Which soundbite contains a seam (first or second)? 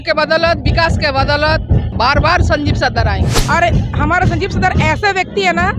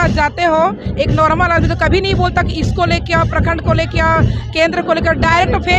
first